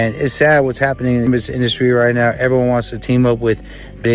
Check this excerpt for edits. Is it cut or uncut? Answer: uncut